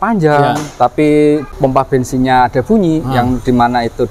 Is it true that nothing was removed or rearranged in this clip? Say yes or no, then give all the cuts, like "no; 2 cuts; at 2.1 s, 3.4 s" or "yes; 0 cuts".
no; 1 cut; at 1.5 s